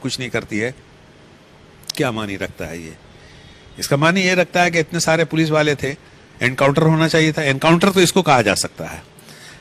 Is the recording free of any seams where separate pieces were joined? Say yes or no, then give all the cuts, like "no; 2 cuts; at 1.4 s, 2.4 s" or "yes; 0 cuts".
yes; 0 cuts